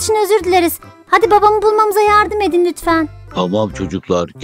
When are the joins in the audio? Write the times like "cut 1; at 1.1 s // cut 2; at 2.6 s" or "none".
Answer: cut 1; at 3.3 s